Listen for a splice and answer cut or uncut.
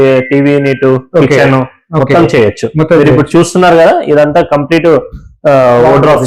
uncut